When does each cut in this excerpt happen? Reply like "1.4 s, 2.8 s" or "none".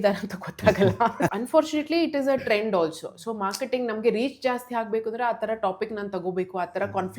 1.3 s